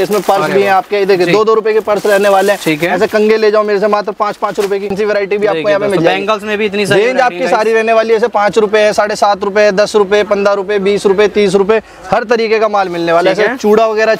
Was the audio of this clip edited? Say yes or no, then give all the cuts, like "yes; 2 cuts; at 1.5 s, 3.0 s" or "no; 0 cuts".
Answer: yes; 1 cut; at 4.9 s